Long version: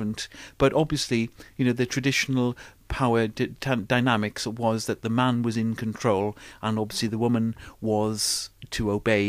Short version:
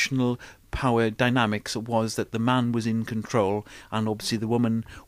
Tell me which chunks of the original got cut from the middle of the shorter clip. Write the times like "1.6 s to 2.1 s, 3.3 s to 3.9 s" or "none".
3.3 s to 3.8 s